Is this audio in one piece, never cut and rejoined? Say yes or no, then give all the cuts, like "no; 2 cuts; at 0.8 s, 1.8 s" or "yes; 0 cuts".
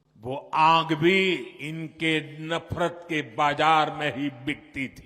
no; 1 cut; at 1.6 s